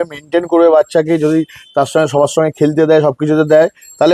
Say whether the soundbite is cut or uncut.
uncut